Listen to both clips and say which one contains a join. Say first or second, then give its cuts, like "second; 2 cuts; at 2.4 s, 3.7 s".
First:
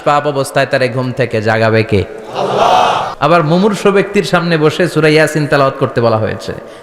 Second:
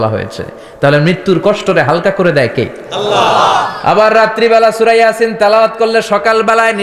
first; 1 cut; at 3.1 s